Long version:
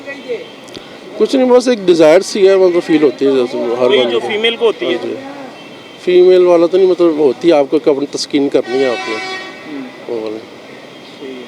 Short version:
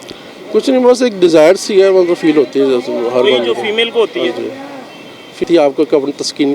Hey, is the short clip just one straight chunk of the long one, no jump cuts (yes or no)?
no